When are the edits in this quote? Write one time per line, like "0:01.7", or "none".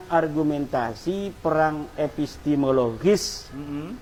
none